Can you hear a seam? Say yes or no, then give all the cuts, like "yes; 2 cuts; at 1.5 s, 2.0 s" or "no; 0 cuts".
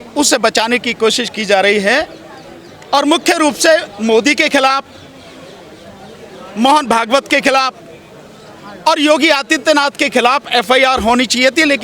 no; 0 cuts